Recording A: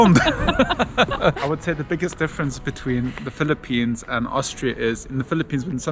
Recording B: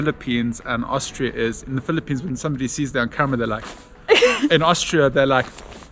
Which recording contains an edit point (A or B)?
A